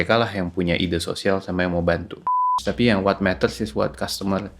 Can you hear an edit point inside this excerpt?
yes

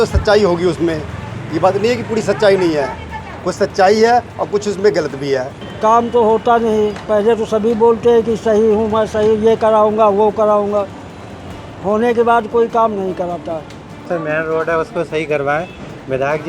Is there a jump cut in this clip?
yes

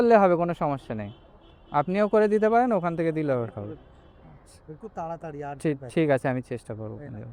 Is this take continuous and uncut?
yes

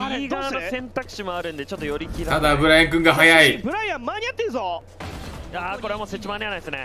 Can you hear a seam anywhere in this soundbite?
yes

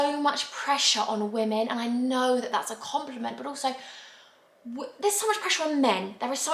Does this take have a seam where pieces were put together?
no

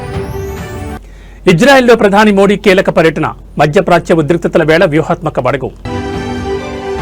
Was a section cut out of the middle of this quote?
no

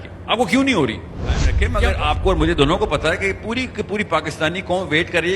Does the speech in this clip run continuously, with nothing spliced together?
no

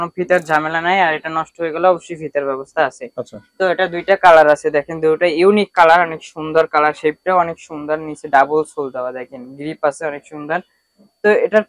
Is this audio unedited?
yes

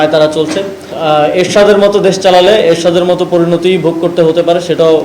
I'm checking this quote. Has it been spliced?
yes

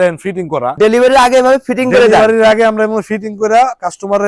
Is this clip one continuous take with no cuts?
yes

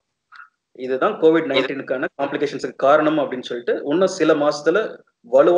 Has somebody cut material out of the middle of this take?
no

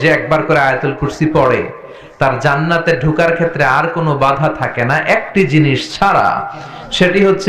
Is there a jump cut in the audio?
no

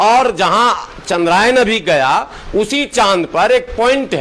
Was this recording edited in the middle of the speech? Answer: no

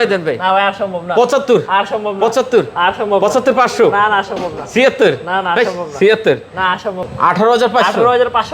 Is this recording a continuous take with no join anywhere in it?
no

